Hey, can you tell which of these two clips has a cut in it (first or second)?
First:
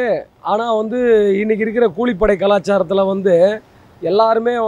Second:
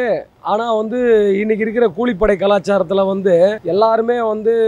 second